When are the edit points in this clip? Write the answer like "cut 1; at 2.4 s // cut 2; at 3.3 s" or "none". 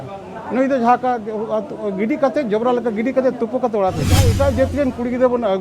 cut 1; at 4.3 s